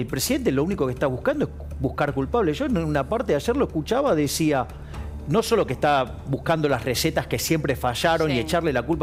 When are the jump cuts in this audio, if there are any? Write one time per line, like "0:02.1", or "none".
none